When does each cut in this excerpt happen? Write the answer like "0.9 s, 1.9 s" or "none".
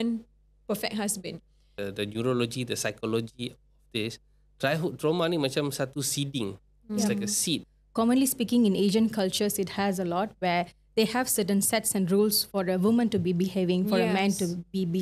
1.7 s, 7.7 s